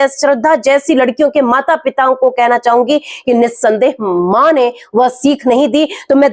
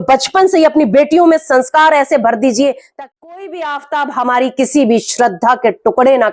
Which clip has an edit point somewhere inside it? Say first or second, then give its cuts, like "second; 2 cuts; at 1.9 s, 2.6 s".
second; 1 cut; at 2.8 s